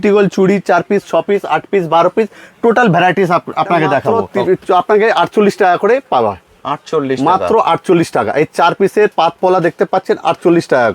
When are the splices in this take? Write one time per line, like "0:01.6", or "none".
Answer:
0:04.2